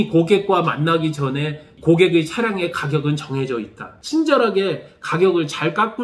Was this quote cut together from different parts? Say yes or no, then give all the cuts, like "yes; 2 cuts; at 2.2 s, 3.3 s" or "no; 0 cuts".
yes; 1 cut; at 3.9 s